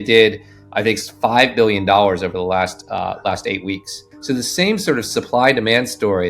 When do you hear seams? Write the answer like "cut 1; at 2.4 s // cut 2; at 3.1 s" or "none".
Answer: cut 1; at 4.1 s